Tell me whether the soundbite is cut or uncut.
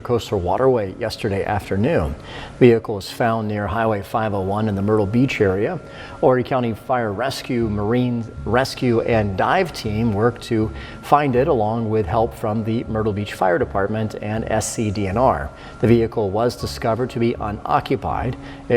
uncut